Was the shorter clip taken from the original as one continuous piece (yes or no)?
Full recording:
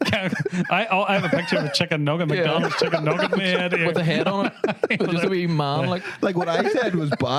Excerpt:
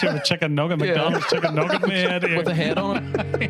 yes